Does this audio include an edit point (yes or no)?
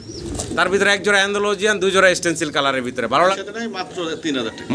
yes